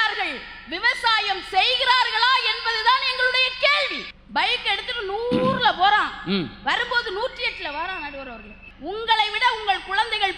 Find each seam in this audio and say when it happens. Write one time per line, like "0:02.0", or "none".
0:08.5